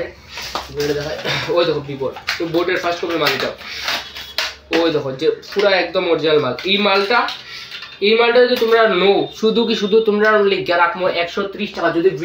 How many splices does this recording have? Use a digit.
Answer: 0